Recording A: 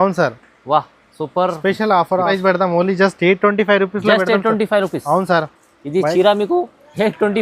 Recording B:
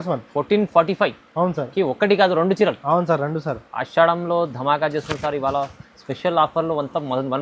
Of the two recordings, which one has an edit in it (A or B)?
A